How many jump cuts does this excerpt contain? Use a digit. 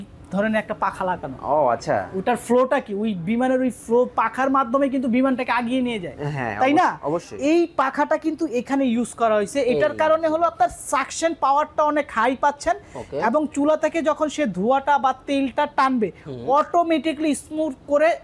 0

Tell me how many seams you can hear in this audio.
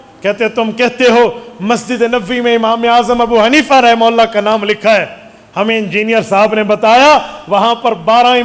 0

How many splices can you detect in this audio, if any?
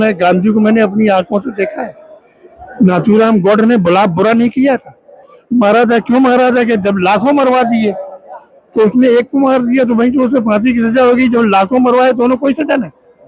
0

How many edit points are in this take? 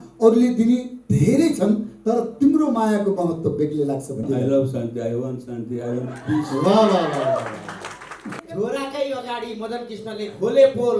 2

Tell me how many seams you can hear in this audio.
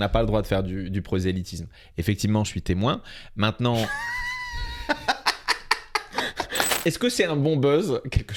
1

